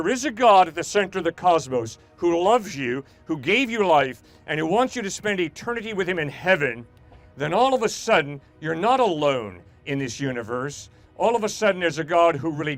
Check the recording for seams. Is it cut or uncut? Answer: uncut